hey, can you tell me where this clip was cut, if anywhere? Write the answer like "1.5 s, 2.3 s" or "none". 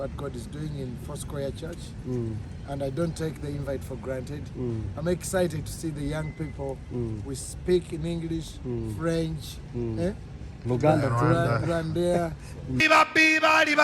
12.8 s